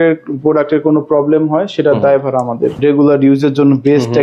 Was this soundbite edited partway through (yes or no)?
yes